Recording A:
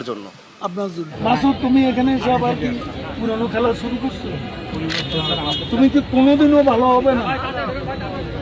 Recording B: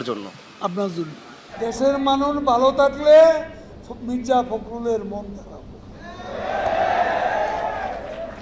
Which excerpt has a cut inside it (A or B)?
A